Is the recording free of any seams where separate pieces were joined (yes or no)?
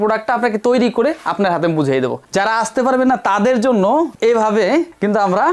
no